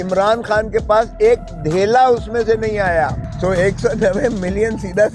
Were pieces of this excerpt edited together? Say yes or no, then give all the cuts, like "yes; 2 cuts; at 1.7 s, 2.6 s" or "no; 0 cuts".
yes; 1 cut; at 3.2 s